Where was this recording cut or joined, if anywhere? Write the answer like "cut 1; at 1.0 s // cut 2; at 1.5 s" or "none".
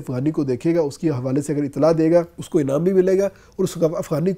cut 1; at 2.4 s

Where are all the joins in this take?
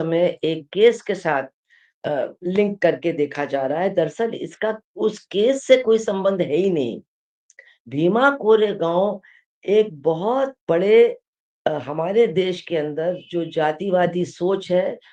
none

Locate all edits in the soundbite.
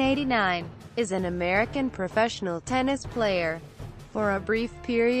none

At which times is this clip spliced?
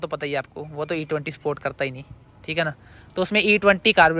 none

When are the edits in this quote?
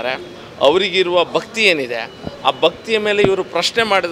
none

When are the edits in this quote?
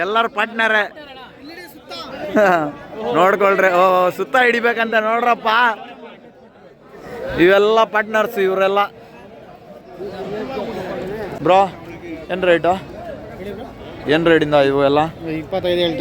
cut 1; at 10.8 s

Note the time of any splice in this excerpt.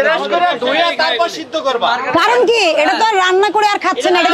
none

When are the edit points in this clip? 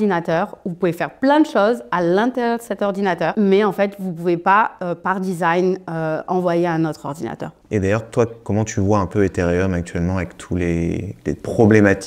cut 1; at 3.3 s // cut 2; at 7.5 s

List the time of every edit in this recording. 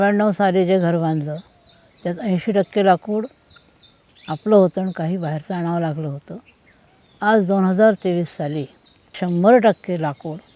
cut 1; at 9.2 s

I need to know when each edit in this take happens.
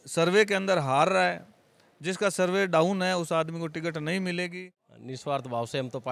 cut 1; at 4.5 s

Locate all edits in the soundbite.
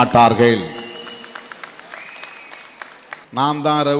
cut 1; at 2.8 s

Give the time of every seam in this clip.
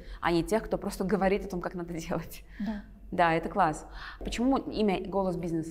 none

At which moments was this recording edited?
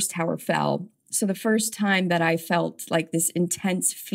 none

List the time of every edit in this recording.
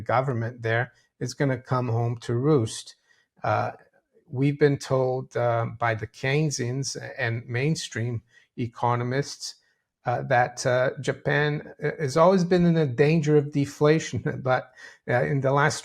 none

